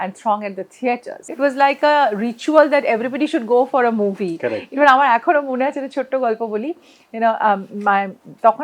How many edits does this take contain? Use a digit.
1